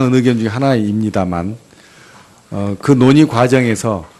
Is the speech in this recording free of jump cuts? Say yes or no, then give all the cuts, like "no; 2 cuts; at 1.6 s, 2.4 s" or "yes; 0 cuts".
no; 1 cut; at 2.6 s